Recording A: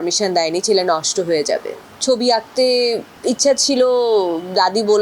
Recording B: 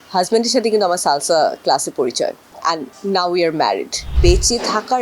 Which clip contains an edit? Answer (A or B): B